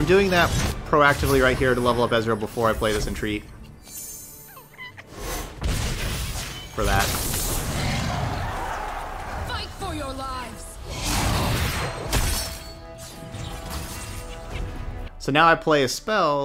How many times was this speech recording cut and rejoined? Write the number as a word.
one